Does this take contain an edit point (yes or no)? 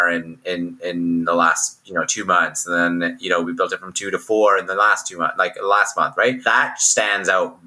yes